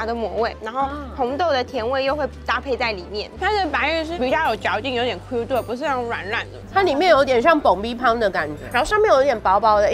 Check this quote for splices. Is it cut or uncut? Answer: cut